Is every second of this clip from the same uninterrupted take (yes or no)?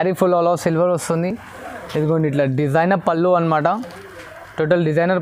yes